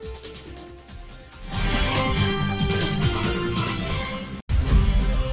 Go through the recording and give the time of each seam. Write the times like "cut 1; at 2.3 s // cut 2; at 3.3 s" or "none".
cut 1; at 4.4 s

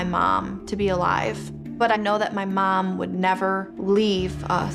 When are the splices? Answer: cut 1; at 1.6 s // cut 2; at 3.7 s

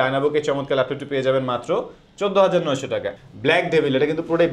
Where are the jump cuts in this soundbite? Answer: cut 1; at 3.1 s

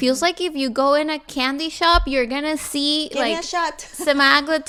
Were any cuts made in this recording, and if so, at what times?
none

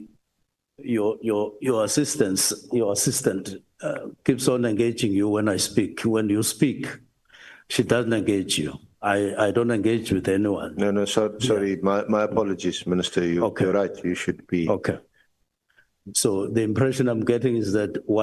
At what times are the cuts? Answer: none

